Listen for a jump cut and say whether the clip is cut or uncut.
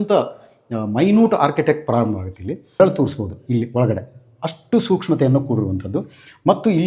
cut